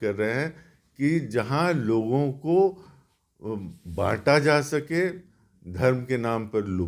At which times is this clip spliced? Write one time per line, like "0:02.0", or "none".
none